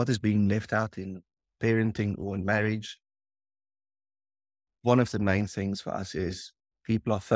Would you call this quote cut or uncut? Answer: uncut